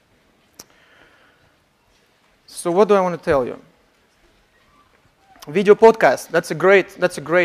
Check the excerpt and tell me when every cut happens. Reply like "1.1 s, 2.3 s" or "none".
3.1 s